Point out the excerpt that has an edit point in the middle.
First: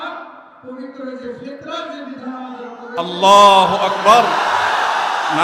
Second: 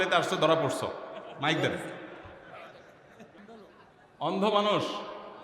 second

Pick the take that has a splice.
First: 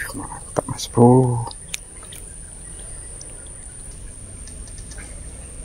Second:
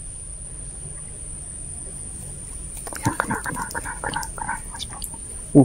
first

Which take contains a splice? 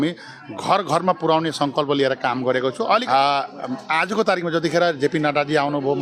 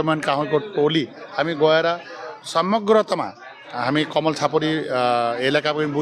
first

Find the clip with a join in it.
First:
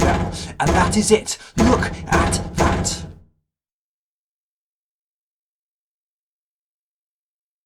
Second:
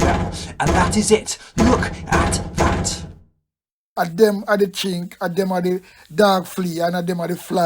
second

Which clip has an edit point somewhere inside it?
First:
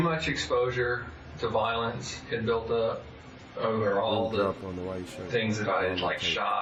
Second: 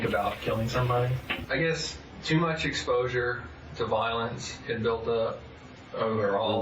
second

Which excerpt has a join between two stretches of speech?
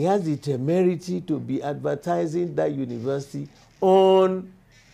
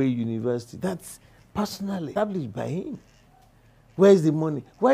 second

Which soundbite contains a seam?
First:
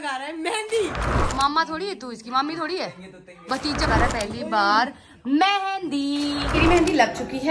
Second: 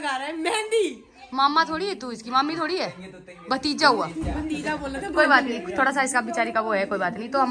first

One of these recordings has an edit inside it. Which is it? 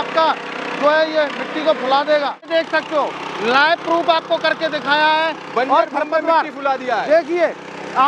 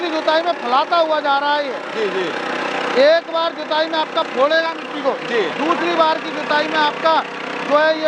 first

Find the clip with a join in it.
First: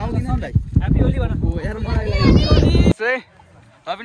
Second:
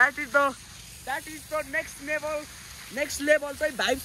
first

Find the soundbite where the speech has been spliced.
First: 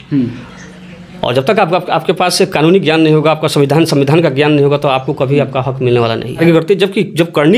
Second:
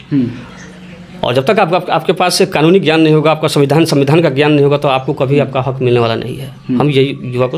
first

